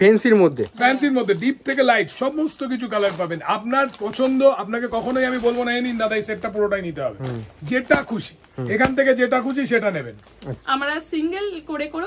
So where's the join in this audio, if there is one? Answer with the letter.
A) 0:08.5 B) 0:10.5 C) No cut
B